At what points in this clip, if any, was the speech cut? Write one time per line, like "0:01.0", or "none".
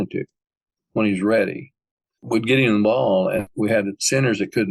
0:02.2
0:03.5